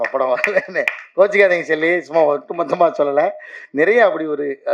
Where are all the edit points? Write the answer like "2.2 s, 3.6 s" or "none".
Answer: none